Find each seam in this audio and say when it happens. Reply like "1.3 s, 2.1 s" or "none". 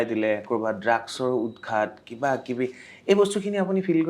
none